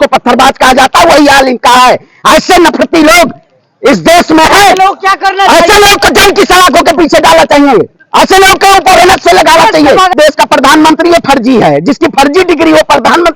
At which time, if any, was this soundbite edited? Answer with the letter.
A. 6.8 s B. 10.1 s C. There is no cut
B